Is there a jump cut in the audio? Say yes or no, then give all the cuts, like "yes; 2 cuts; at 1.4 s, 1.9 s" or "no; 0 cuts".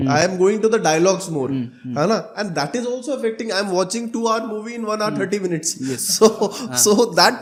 no; 0 cuts